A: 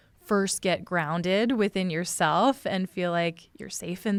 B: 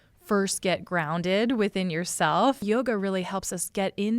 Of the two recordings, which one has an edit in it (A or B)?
B